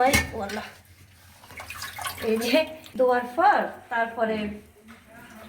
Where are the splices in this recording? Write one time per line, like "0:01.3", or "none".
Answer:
0:02.8